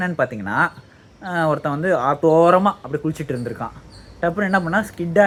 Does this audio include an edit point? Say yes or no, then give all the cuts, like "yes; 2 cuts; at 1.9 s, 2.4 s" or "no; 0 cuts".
no; 0 cuts